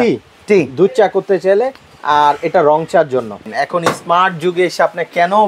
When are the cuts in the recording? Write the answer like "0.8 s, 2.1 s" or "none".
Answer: 3.4 s